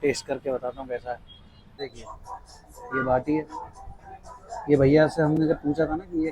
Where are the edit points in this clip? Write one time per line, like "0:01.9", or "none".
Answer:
0:01.8